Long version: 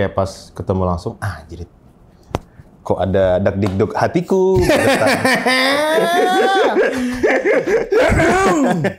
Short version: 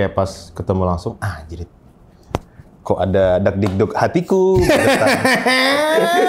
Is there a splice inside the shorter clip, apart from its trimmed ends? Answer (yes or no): no